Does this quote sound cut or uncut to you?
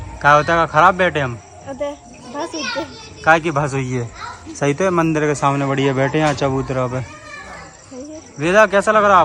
uncut